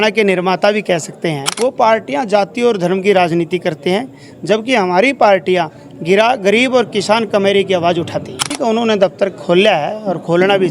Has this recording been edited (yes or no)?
yes